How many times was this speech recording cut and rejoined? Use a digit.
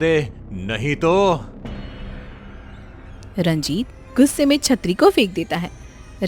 2